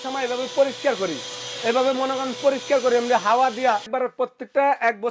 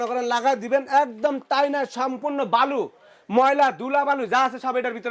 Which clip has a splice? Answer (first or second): first